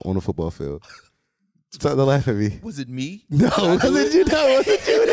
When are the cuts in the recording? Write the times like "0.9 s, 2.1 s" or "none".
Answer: none